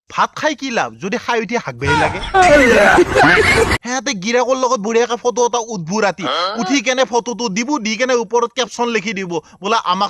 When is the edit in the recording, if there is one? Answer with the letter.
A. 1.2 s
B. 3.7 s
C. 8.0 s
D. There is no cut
B